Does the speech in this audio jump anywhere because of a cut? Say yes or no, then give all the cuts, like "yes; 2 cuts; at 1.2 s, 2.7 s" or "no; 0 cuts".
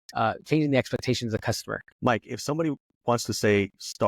yes; 1 cut; at 1.8 s